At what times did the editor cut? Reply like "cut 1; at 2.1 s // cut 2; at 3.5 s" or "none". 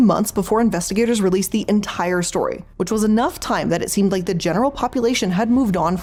none